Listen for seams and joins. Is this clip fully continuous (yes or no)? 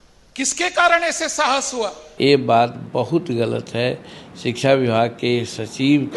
no